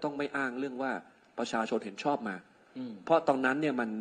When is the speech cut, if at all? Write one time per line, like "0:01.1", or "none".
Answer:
none